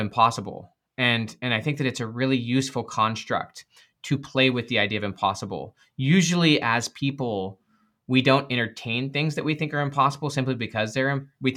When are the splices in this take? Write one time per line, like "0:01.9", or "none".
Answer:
none